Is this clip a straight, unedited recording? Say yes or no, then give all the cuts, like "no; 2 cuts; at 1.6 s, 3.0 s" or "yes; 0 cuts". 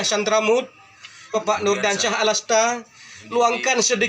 no; 1 cut; at 1.3 s